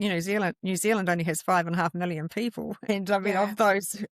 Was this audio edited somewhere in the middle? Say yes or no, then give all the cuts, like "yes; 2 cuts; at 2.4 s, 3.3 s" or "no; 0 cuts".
yes; 1 cut; at 2.8 s